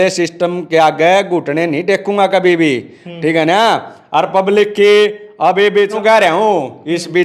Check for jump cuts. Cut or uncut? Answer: cut